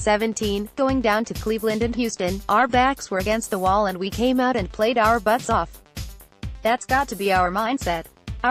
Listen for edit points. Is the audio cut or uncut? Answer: uncut